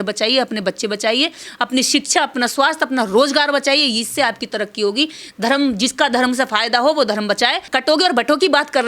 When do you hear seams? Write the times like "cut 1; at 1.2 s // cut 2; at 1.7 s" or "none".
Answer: cut 1; at 7.7 s